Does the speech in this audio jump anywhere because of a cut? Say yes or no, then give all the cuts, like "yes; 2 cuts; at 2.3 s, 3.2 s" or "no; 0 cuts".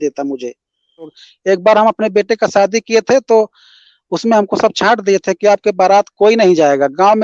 yes; 1 cut; at 1.2 s